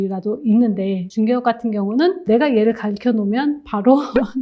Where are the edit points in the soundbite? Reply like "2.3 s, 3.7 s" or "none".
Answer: 2.2 s

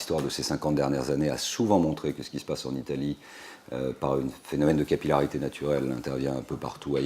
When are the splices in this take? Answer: 1.4 s

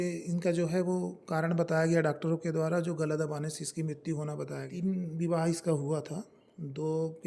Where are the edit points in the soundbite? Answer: 4.6 s

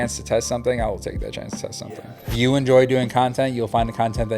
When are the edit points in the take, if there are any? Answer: 1.9 s

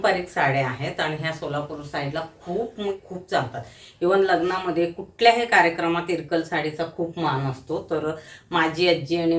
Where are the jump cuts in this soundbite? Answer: none

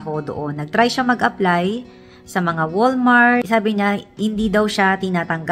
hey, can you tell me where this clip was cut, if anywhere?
none

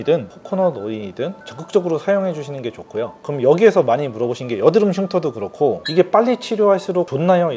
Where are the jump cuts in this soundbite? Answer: 1.4 s, 3.2 s

